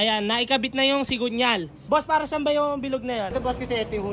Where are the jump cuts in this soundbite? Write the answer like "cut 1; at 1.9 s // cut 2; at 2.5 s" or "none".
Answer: cut 1; at 1.8 s // cut 2; at 3.3 s